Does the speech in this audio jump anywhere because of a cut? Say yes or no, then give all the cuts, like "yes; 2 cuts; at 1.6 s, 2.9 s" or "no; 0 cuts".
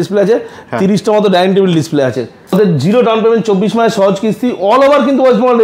yes; 1 cut; at 2.5 s